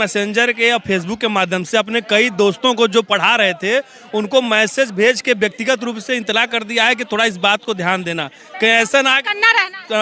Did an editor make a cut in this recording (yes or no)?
no